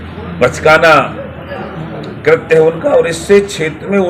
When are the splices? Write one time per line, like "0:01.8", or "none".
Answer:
none